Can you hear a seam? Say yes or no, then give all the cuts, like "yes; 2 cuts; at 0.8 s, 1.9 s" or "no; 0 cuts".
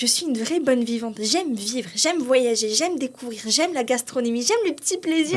no; 0 cuts